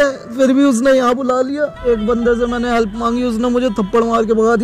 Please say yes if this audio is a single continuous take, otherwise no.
no